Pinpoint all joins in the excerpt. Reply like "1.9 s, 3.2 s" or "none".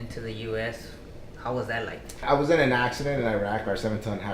2.2 s